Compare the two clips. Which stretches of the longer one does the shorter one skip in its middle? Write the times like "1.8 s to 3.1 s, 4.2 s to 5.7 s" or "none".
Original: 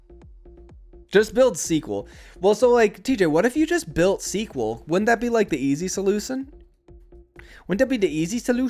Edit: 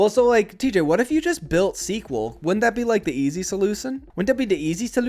6.5 s to 7.6 s